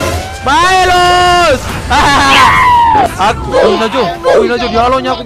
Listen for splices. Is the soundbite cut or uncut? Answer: uncut